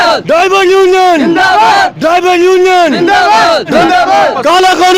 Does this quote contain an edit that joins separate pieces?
yes; 1 cut; at 3.8 s

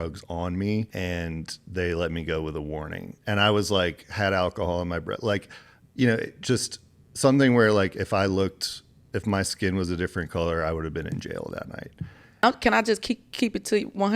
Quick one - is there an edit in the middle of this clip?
yes; 2 cuts; at 0.9 s, 12.4 s

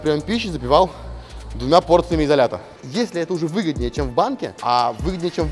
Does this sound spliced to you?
yes; 2 cuts; at 2.8 s, 4.5 s

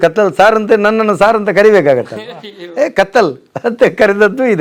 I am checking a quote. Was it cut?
no; 0 cuts

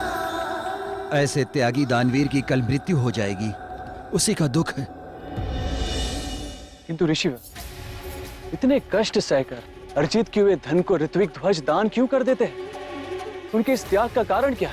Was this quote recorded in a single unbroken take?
no; 1 cut; at 0.9 s

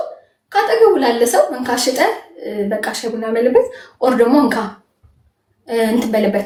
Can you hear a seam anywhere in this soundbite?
no; 0 cuts

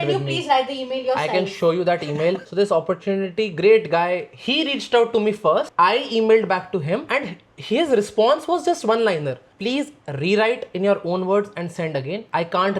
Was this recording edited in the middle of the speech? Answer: yes; 1 cut; at 2.4 s

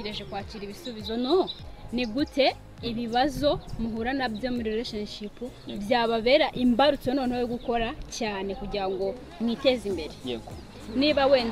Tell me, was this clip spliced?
yes; 1 cut; at 1.6 s

